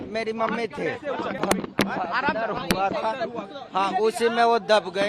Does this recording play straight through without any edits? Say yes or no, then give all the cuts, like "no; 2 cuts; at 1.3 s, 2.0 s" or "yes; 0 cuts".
no; 1 cut; at 1.3 s